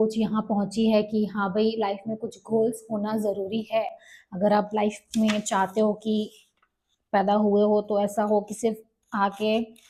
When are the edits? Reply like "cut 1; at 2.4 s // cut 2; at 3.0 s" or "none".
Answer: none